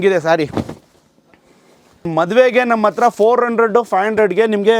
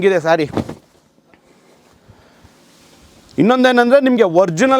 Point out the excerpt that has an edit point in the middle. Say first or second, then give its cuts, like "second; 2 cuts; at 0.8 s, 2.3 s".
first; 1 cut; at 2.1 s